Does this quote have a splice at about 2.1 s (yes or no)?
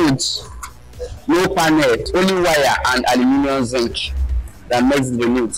yes